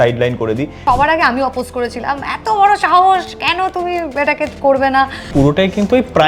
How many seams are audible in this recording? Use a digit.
2